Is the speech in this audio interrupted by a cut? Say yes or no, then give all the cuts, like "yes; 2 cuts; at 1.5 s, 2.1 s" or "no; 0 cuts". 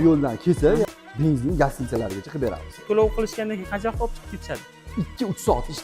yes; 2 cuts; at 0.9 s, 2.8 s